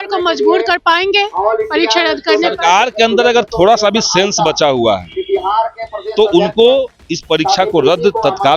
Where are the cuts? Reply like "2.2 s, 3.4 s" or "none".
none